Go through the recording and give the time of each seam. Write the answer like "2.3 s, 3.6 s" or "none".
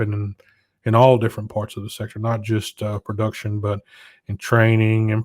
none